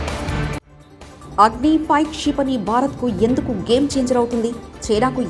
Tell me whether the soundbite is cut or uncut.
uncut